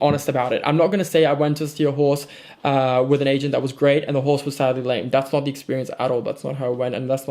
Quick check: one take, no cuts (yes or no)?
yes